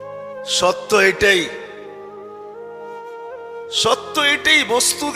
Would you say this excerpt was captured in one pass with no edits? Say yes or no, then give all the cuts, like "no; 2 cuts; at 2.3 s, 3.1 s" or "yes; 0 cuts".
yes; 0 cuts